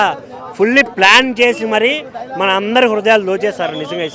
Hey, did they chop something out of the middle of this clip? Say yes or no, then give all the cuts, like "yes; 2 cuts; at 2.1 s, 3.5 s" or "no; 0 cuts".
no; 0 cuts